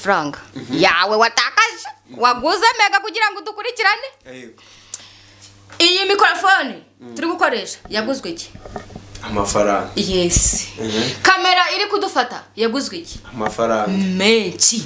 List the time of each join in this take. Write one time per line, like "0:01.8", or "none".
none